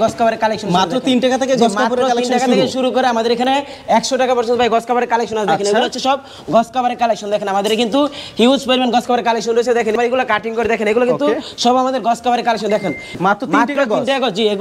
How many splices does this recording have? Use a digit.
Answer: 0